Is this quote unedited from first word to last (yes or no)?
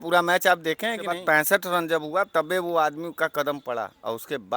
no